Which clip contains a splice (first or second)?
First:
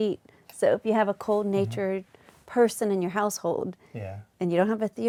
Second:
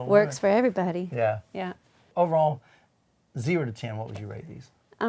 second